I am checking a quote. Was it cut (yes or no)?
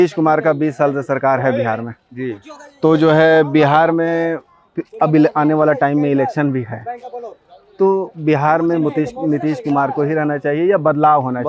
no